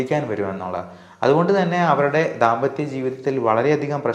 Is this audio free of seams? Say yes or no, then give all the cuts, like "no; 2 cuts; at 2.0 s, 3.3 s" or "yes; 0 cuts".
yes; 0 cuts